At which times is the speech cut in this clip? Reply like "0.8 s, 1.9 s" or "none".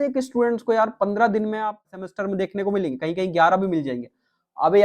2.0 s